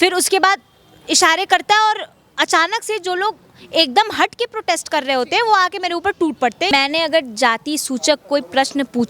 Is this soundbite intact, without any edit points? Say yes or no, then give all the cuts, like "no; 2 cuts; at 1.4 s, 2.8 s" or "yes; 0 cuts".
no; 1 cut; at 6.7 s